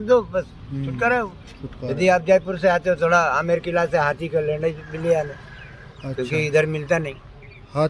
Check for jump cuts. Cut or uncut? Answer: uncut